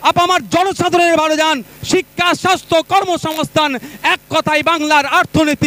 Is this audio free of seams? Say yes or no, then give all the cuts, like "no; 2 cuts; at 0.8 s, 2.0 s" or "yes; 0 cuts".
yes; 0 cuts